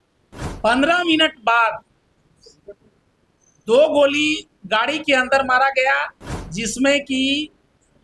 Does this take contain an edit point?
no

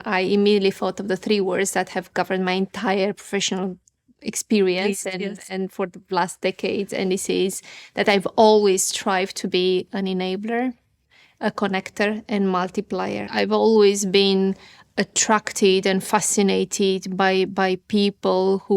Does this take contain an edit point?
yes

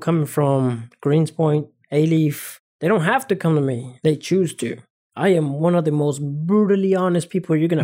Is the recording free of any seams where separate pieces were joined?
no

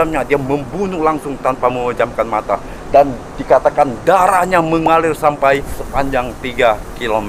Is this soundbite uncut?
yes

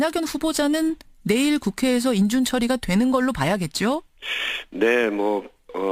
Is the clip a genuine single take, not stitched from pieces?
yes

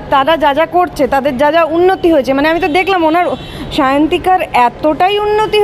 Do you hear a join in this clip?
no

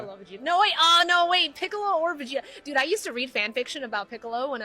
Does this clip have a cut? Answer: yes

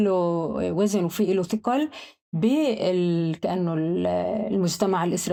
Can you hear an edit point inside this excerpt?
no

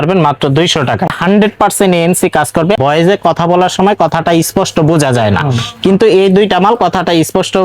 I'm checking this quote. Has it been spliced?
yes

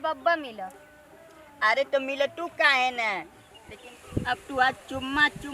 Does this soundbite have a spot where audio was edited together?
yes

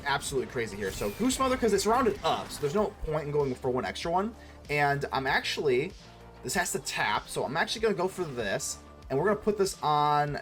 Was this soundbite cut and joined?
no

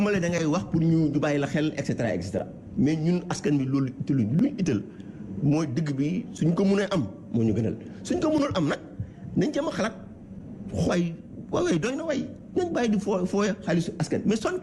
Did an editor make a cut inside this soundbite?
no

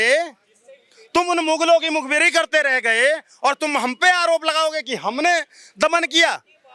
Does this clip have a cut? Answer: no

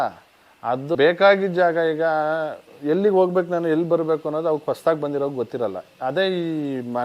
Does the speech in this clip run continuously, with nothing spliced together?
no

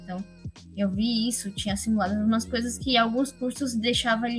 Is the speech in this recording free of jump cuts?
yes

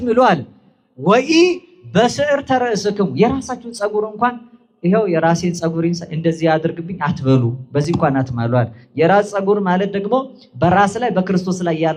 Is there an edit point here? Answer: no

